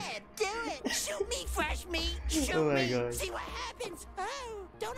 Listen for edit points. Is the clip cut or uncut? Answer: uncut